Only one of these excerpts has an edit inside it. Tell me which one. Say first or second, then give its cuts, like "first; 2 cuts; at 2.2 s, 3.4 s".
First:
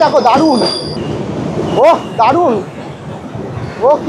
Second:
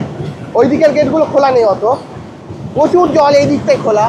first; 1 cut; at 1.0 s